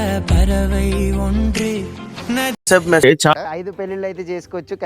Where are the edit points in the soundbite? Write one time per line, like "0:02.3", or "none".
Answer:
0:03.0